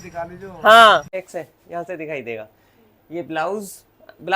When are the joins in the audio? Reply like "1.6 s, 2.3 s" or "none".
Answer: 1.2 s